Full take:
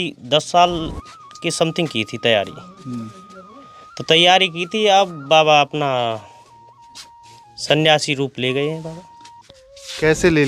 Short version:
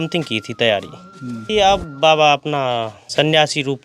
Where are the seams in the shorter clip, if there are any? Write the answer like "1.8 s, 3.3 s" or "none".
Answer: 1.4 s, 3.0 s